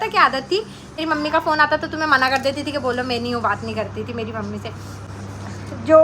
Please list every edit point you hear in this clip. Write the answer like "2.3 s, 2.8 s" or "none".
1.0 s, 5.0 s